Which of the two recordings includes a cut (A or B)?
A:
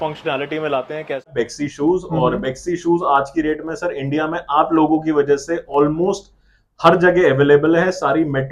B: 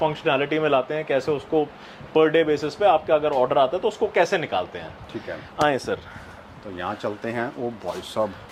A